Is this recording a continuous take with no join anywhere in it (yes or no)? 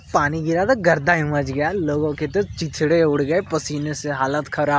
yes